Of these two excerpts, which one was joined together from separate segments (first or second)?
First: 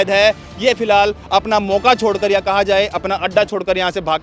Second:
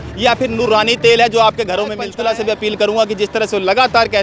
second